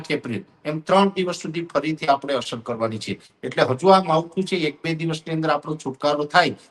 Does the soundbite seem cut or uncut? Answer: uncut